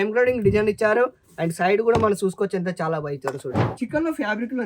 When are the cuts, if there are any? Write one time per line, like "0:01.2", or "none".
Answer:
0:03.7

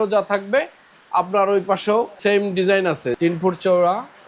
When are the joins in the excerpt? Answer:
0:02.2
0:03.2

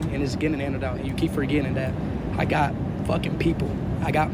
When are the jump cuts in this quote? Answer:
none

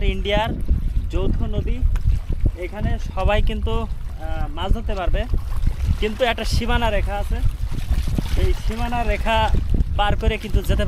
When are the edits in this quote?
none

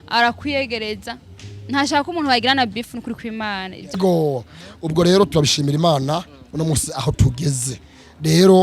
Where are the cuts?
0:03.9

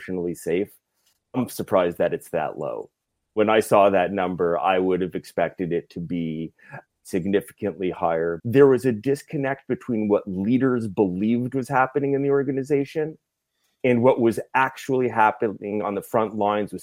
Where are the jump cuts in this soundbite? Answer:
0:08.4

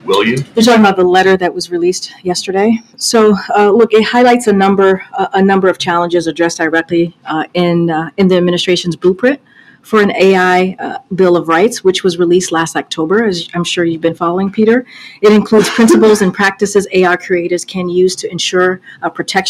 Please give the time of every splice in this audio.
0:13.4
0:15.0

